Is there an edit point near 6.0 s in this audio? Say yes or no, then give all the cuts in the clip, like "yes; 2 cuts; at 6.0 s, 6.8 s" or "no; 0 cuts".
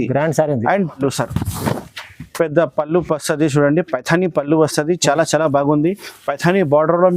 no; 1 cut; at 1.0 s